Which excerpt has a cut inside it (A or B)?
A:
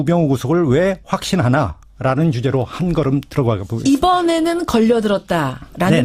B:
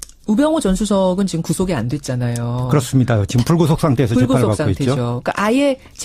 B